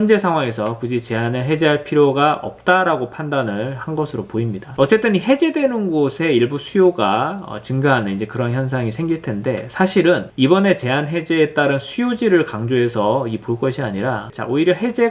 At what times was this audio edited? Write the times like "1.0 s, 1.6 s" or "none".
4.7 s